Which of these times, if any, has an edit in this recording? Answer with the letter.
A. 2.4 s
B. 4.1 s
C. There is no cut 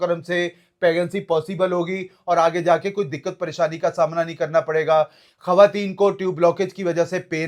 C